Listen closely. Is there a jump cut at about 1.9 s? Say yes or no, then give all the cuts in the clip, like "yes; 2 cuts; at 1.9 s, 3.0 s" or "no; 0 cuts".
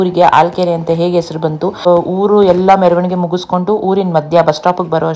yes; 1 cut; at 1.9 s